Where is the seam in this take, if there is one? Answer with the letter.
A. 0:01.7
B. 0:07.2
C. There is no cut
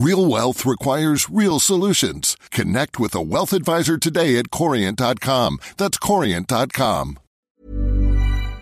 B